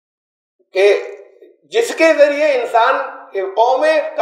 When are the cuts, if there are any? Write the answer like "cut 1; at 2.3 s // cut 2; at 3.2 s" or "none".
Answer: none